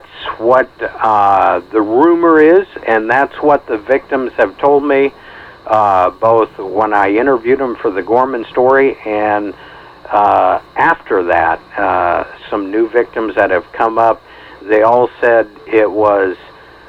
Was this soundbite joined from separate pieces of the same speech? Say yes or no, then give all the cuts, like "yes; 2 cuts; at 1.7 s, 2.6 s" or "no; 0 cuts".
no; 0 cuts